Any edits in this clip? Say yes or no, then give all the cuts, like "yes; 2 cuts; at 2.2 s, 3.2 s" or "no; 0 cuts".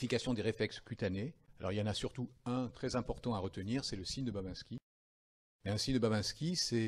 no; 0 cuts